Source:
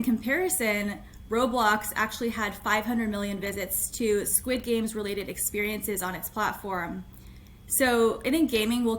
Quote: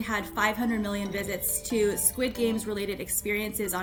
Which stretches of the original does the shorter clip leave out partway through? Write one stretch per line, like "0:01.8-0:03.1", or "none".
none